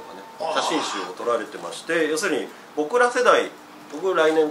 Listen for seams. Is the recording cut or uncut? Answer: uncut